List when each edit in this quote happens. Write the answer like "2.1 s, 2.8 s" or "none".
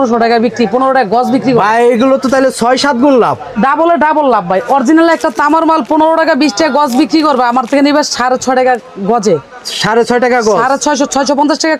none